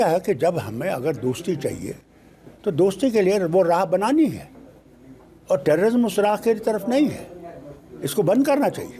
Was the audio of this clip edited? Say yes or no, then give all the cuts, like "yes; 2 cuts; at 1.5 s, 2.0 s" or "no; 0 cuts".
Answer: no; 0 cuts